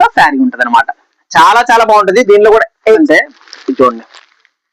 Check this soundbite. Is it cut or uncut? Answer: cut